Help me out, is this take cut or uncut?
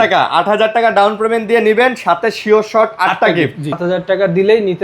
cut